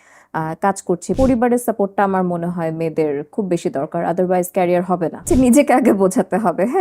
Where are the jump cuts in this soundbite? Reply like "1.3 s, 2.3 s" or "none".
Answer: 1.2 s, 5.3 s